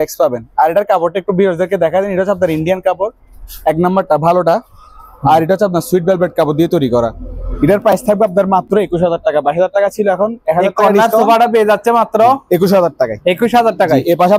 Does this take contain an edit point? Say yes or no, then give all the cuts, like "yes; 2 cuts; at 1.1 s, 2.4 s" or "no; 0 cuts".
no; 0 cuts